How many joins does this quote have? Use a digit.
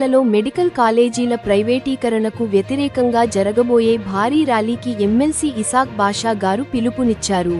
0